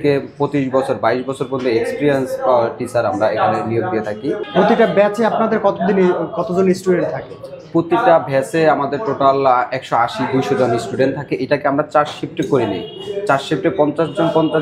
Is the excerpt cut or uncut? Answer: uncut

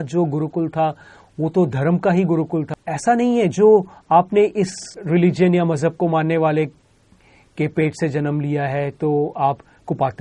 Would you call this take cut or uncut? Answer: cut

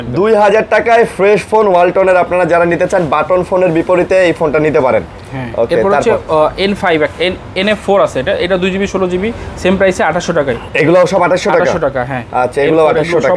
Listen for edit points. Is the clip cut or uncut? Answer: uncut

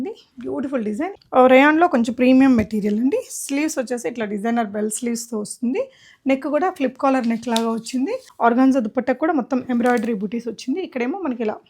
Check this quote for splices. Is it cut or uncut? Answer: cut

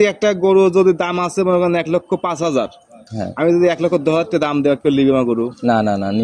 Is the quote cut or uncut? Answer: uncut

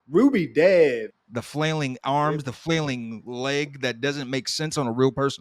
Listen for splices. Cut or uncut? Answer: cut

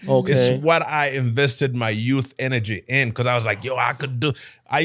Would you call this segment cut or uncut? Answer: uncut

